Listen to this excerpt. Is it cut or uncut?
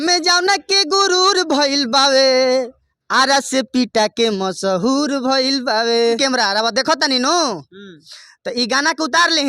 cut